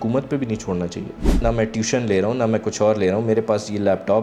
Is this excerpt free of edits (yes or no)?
no